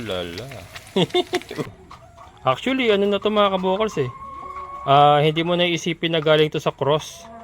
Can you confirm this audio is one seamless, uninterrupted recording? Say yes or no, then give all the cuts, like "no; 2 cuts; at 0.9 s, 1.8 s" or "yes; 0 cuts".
no; 1 cut; at 1.7 s